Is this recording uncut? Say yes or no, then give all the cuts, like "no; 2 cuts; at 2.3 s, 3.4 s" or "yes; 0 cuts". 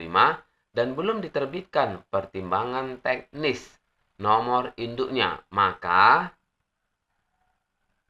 yes; 0 cuts